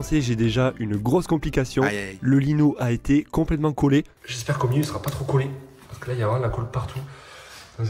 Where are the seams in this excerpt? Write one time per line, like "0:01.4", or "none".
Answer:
none